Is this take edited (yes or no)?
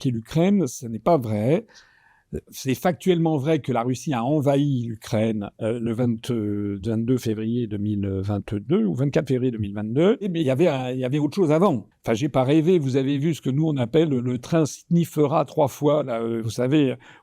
yes